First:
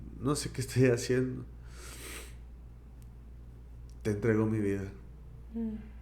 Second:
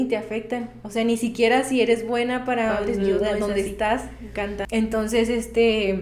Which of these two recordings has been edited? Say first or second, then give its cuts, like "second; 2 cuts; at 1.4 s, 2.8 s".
second; 1 cut; at 4.7 s